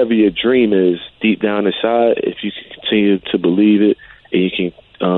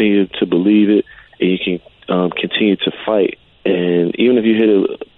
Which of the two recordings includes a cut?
second; 1 cut; at 3.5 s

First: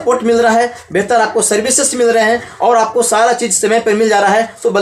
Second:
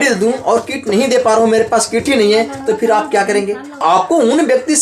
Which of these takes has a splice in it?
second; 1 cut; at 3.8 s

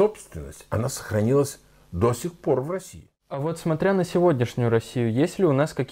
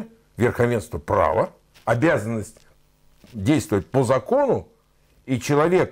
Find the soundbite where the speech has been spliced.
first; 1 cut; at 3.4 s

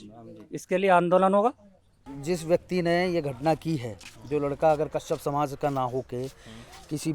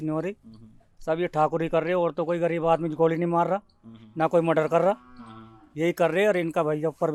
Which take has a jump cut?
first; 1 cut; at 2.1 s

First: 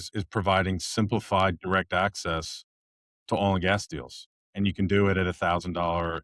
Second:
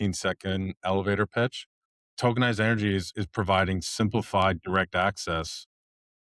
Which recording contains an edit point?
second; 1 cut; at 2.1 s

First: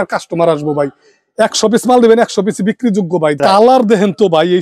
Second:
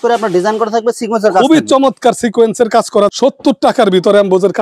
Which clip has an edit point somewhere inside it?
first; 1 cut; at 3.4 s

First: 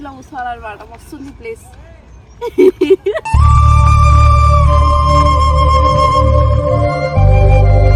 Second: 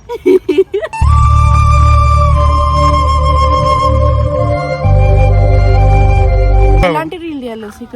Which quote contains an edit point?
second; 1 cut; at 6.8 s

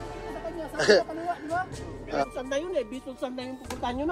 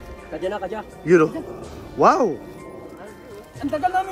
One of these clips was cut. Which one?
first; 1 cut; at 2.2 s

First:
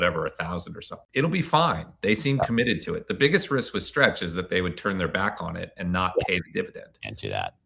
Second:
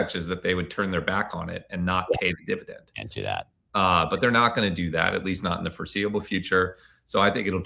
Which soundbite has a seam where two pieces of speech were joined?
first; 1 cut; at 1.0 s

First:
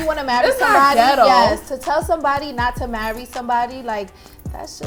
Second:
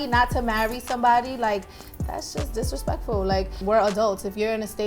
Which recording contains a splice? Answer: second; 1 cut; at 3.6 s

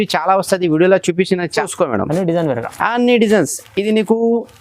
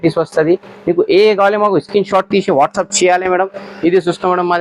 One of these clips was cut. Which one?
first; 1 cut; at 1.5 s

